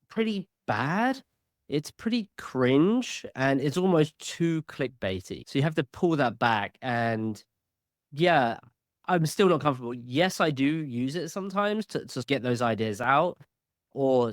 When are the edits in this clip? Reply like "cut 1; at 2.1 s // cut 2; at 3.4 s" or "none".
none